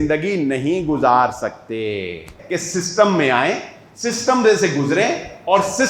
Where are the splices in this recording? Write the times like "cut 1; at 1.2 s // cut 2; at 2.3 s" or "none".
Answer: cut 1; at 2.4 s